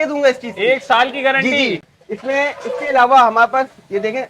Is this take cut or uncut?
uncut